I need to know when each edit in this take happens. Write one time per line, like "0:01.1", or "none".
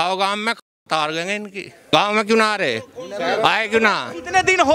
0:01.9